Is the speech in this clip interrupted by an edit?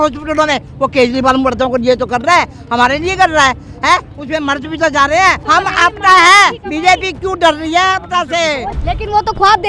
yes; 2 cuts; at 5.4 s, 8.7 s

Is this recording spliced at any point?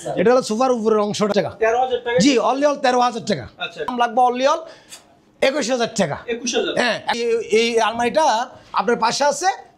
yes; 3 cuts; at 1.3 s, 3.9 s, 7.1 s

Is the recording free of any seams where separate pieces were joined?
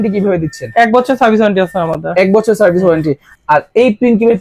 no; 1 cut; at 3.3 s

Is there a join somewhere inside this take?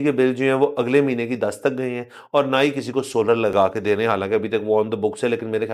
yes; 1 cut; at 3.5 s

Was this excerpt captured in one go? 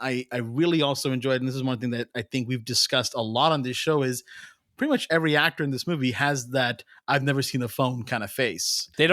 yes; 0 cuts

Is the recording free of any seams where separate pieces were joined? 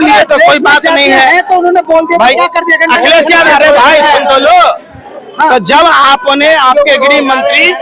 yes; 0 cuts

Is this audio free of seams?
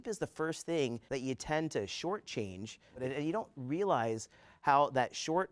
no; 2 cuts; at 1.0 s, 3.0 s

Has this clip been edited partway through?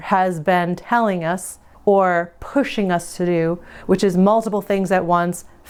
no; 0 cuts

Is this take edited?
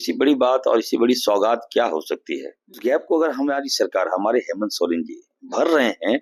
yes; 1 cut; at 2.8 s

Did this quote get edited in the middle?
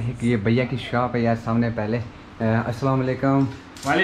no; 0 cuts

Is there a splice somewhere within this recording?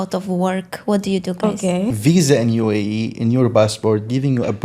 yes; 1 cut; at 1.9 s

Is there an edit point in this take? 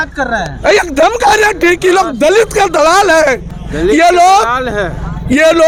no; 0 cuts

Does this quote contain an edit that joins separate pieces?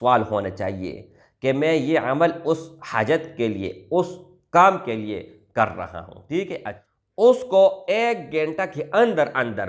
yes; 1 cut; at 6.5 s

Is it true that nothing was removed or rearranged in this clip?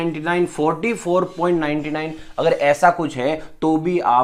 yes; 0 cuts

